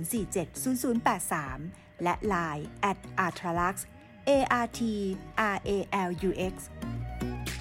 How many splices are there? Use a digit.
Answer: 1